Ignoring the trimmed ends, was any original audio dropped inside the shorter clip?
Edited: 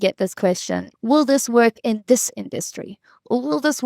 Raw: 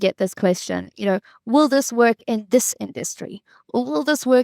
yes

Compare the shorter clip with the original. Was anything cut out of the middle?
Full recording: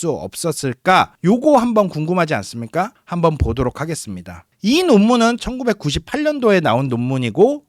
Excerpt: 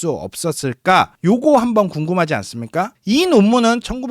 yes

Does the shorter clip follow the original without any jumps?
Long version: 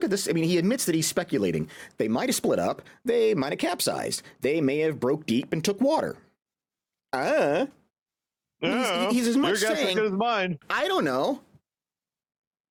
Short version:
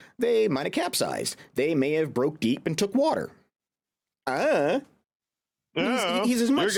yes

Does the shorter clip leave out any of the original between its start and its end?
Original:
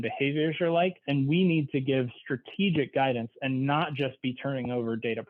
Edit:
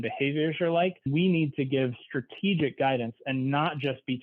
yes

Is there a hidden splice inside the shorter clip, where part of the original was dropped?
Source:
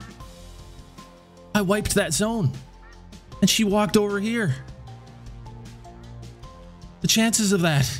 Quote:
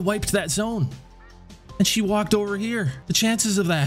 yes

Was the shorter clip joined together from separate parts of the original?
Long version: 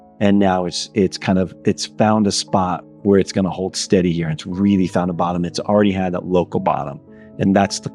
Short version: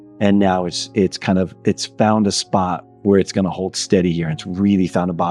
no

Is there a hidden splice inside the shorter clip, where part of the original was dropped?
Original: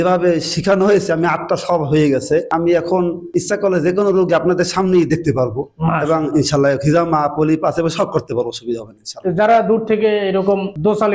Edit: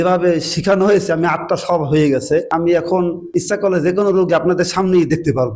no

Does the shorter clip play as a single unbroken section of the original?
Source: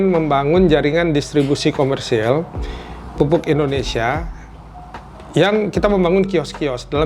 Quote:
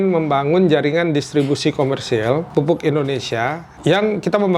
no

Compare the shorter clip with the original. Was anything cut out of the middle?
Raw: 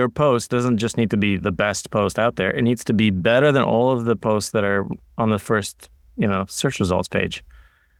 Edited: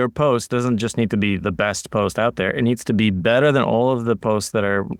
no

